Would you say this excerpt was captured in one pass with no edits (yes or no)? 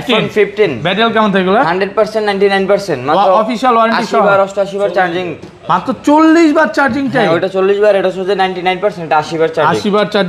yes